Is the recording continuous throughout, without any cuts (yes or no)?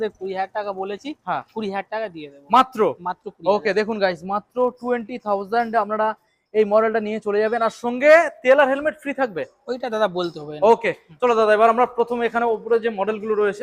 yes